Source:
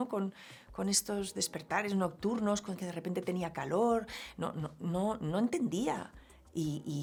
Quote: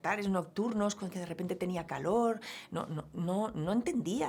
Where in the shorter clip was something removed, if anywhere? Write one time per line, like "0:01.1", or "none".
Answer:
none